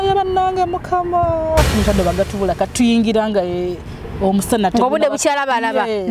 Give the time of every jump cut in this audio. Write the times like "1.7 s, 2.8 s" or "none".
1.7 s